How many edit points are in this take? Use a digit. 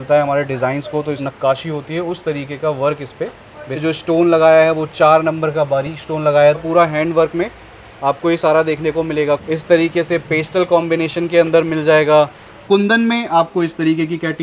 5